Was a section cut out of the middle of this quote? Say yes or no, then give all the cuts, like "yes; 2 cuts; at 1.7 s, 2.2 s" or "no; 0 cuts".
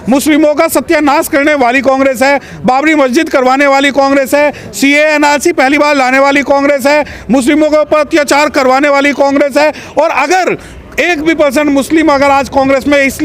no; 0 cuts